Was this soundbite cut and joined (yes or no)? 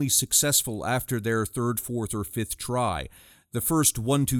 no